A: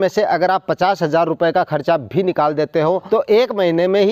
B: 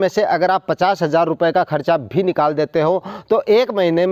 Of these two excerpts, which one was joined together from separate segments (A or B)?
A